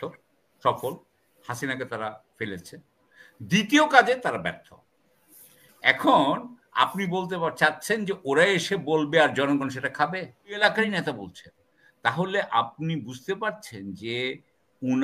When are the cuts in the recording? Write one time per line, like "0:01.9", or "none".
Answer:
0:10.6